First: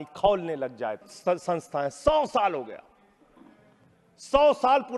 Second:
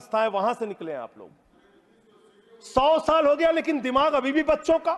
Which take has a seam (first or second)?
first